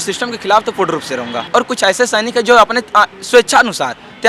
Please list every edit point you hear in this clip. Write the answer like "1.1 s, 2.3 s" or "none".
1.4 s